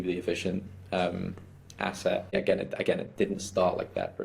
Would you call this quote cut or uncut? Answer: cut